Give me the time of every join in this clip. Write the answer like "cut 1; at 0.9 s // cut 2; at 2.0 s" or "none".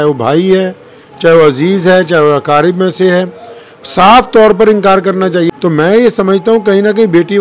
cut 1; at 5.5 s